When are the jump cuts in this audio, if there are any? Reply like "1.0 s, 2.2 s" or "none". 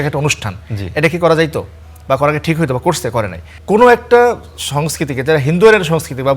3.5 s